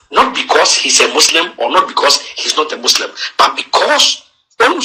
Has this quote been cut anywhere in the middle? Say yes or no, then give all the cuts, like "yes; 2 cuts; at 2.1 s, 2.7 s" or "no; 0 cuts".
no; 0 cuts